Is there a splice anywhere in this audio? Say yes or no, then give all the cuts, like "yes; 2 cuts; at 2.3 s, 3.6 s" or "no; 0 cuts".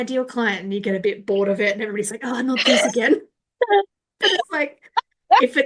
no; 0 cuts